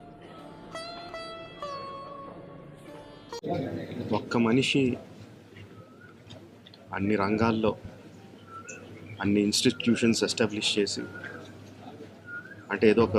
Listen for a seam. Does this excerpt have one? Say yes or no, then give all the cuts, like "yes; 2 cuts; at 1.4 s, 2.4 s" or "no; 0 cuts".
no; 0 cuts